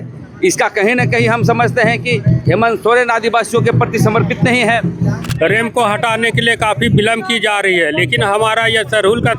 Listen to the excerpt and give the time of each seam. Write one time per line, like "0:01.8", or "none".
0:05.2